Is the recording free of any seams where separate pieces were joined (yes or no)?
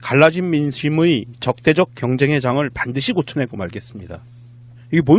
yes